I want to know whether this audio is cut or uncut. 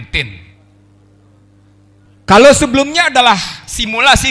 uncut